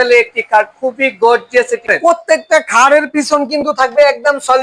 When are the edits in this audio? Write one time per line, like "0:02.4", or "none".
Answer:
0:01.9